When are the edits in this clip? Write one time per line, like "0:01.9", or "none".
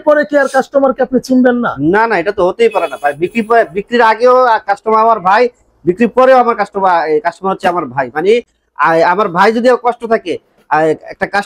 none